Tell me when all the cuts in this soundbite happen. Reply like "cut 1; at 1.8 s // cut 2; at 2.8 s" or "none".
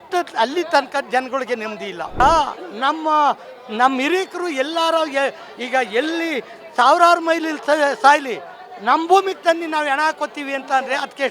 cut 1; at 2.2 s